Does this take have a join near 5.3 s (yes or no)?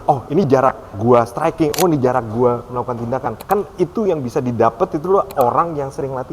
no